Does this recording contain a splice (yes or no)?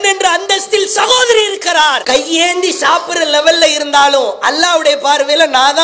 no